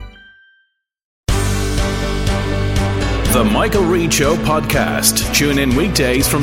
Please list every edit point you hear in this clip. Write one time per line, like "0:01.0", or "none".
0:01.2